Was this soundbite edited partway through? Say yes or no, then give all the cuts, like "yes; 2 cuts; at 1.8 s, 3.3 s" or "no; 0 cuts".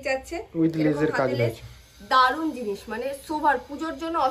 no; 0 cuts